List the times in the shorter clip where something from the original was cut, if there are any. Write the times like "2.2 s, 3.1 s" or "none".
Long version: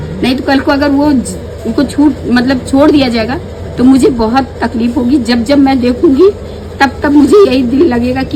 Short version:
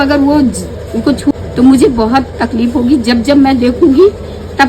1.3 s